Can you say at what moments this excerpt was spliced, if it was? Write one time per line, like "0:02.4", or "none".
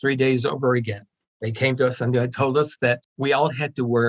0:01.1
0:03.1